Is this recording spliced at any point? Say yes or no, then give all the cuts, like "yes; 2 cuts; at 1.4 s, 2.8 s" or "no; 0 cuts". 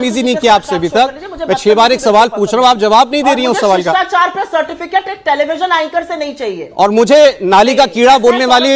no; 0 cuts